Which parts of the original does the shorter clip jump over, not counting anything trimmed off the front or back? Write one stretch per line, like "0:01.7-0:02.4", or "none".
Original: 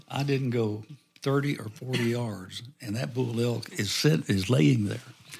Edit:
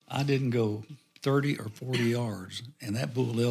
none